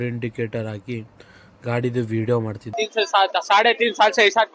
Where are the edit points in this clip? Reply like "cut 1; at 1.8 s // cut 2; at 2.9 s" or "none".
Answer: cut 1; at 2.7 s